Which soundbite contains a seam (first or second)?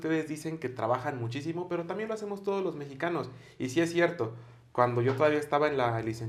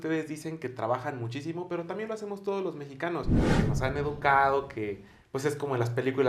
second